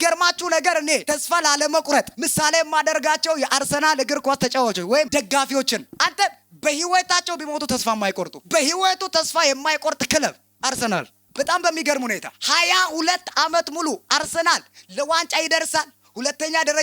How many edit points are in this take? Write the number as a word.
one